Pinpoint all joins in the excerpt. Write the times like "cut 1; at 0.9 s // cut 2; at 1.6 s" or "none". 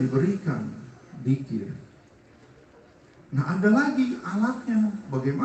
none